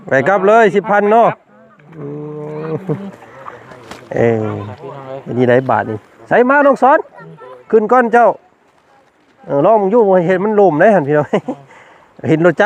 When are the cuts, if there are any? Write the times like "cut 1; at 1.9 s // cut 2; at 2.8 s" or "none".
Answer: none